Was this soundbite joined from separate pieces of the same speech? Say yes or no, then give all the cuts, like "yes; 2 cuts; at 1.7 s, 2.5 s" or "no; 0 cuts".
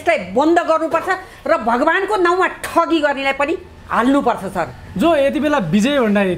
no; 0 cuts